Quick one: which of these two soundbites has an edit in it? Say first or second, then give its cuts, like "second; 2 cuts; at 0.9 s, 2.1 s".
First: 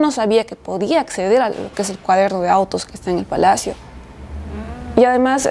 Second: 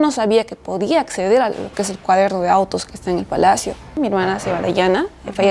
second; 1 cut; at 4.0 s